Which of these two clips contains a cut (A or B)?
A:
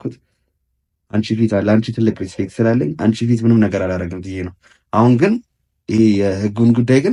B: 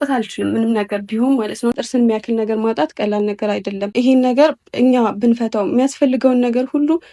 B